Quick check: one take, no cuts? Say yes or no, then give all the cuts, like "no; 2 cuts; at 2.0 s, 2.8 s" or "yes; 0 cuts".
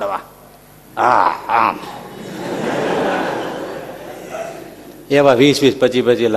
yes; 0 cuts